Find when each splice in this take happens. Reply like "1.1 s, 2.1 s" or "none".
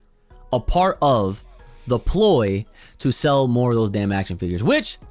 none